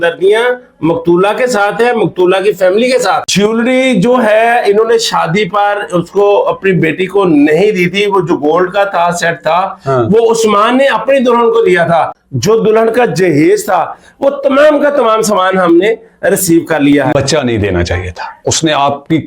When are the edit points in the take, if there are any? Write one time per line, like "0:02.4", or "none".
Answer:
0:03.2
0:12.2
0:17.1